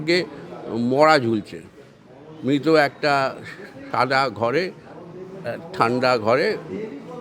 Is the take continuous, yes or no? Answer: yes